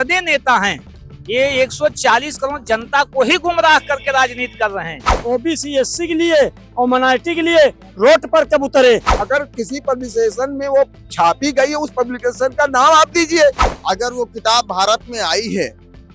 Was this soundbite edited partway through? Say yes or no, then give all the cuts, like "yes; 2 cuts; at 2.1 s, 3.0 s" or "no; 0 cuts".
yes; 3 cuts; at 5.1 s, 9.1 s, 13.7 s